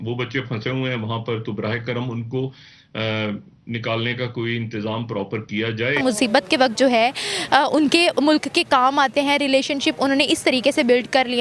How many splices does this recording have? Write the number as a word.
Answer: one